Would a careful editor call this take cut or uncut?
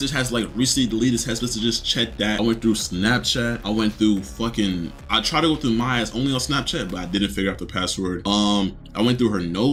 uncut